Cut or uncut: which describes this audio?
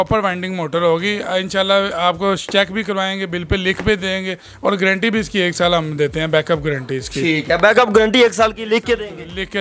uncut